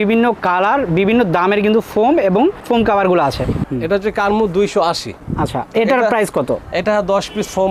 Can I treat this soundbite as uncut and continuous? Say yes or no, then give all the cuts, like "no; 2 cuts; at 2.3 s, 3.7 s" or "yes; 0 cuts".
no; 2 cuts; at 3.6 s, 5.2 s